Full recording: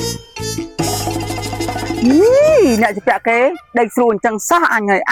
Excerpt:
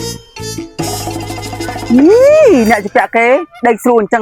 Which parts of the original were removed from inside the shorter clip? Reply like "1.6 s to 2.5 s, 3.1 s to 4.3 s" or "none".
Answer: 1.9 s to 2.0 s